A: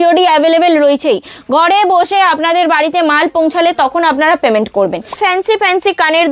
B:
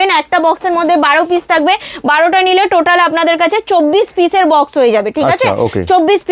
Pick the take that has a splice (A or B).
A